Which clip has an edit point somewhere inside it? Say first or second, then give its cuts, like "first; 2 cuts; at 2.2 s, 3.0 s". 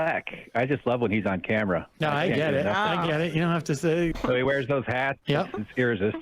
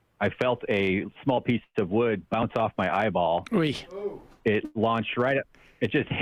first; 2 cuts; at 4.1 s, 5.2 s